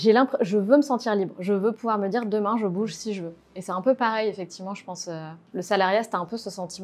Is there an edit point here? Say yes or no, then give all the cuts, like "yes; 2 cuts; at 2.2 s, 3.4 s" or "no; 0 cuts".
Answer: no; 0 cuts